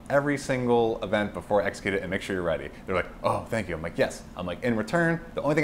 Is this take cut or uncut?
uncut